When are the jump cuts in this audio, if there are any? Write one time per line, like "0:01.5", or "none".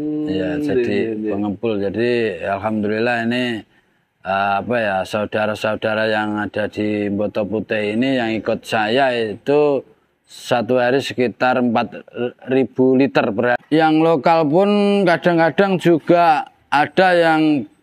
0:13.6